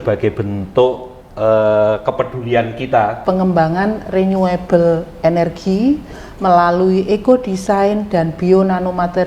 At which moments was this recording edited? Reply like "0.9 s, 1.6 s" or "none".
3.2 s